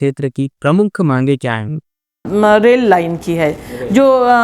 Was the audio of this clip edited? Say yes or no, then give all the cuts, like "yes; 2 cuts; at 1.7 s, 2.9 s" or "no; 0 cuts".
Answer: yes; 1 cut; at 2.2 s